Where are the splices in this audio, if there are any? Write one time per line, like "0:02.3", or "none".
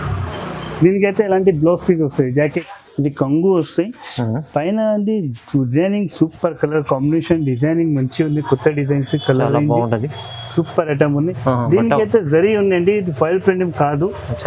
0:02.6

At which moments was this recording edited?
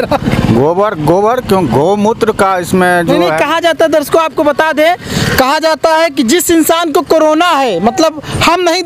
none

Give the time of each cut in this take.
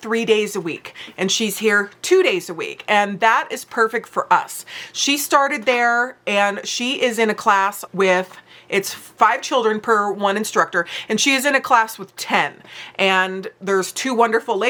none

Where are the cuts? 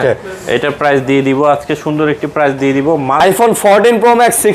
0:03.2

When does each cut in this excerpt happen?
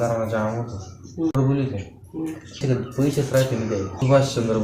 0:01.3

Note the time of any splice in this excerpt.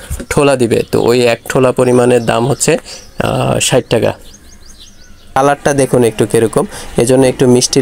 0:05.4

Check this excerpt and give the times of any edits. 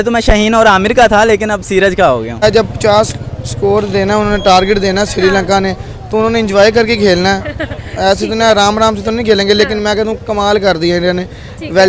none

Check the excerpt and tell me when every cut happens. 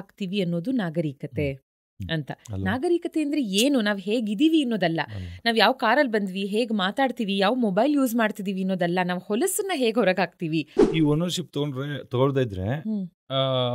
0:10.8

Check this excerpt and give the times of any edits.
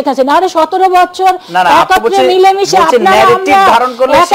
none

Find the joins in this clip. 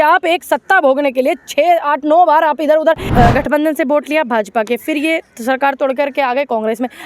0:03.1

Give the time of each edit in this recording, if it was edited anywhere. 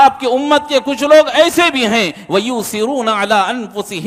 none

